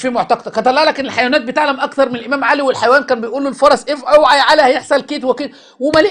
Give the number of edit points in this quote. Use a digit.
0